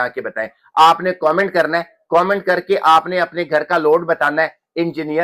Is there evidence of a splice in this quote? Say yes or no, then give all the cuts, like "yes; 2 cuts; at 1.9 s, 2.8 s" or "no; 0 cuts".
no; 0 cuts